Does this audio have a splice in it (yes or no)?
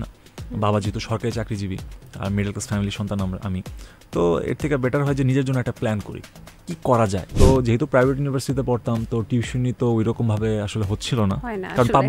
yes